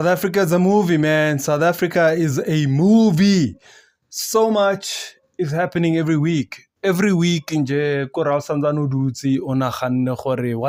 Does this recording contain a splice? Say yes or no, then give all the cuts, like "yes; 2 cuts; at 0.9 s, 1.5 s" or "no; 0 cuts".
no; 0 cuts